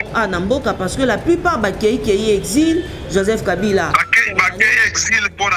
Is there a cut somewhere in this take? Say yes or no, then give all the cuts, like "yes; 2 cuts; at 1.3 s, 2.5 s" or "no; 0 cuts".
no; 0 cuts